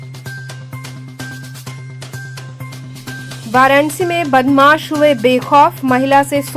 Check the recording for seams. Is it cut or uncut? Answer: cut